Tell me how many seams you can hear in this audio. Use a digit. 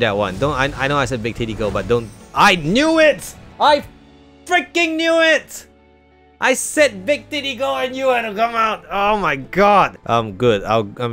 1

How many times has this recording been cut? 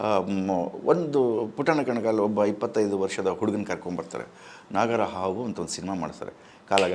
0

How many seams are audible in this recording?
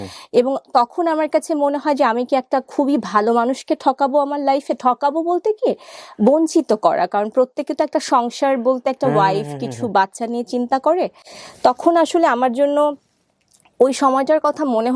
0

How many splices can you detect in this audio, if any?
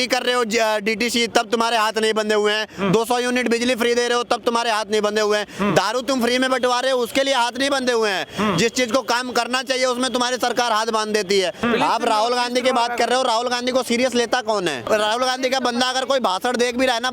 2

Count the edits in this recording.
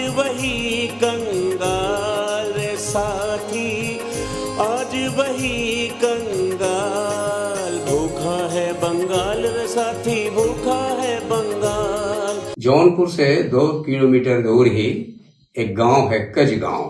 1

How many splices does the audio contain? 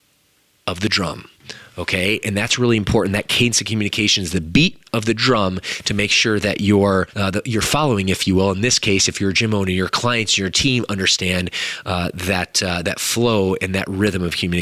1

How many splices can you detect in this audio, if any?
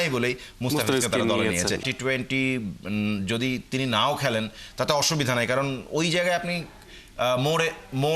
1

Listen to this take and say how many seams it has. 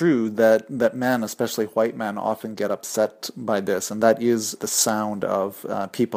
1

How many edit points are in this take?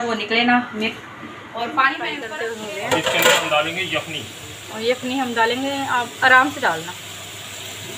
1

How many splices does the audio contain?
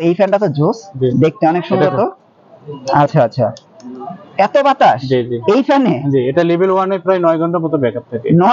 0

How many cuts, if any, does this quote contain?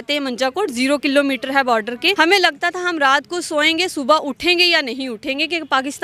1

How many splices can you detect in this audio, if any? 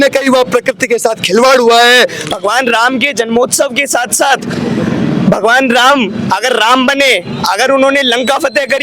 1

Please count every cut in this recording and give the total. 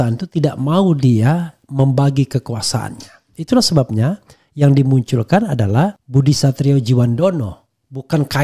2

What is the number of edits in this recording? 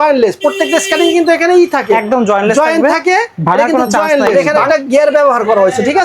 1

